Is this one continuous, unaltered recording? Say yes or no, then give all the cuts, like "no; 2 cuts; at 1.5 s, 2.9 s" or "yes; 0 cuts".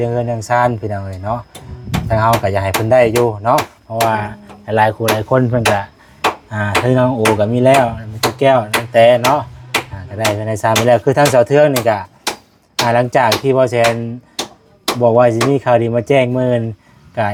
yes; 0 cuts